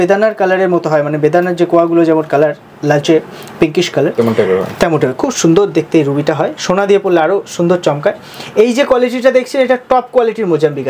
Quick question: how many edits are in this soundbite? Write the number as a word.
zero